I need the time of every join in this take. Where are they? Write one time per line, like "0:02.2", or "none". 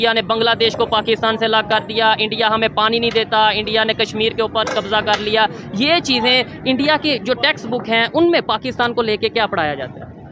none